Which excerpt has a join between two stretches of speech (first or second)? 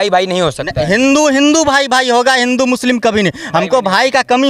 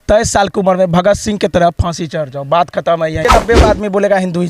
second